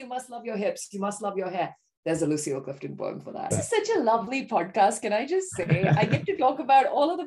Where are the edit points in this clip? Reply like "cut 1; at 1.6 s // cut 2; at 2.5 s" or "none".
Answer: cut 1; at 3.5 s